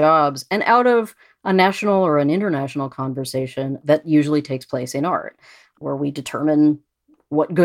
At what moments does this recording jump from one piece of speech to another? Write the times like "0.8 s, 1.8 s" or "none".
3.8 s, 5.8 s